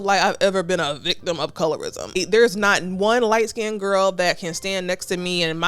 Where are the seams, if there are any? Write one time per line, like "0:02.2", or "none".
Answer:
0:02.2